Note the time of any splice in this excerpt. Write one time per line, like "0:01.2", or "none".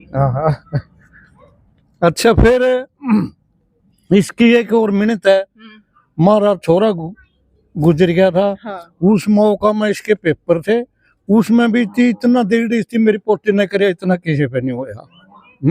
none